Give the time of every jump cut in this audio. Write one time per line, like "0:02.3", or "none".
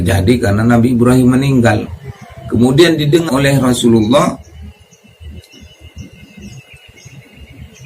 0:03.2